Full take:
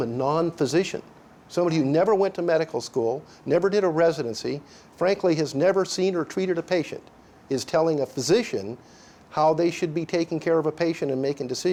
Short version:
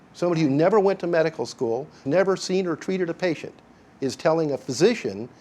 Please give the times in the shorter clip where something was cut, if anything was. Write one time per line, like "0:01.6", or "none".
0:02.0